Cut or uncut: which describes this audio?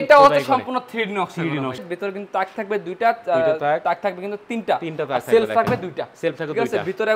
cut